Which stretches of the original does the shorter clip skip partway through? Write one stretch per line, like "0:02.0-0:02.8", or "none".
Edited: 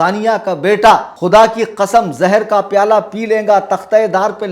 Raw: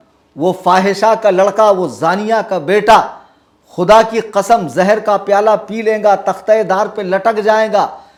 0:03.2-0:03.7